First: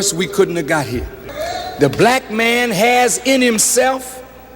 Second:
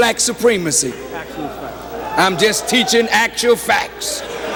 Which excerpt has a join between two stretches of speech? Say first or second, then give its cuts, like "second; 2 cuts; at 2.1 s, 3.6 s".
first; 1 cut; at 1.2 s